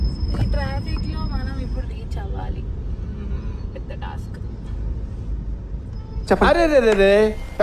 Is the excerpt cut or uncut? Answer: uncut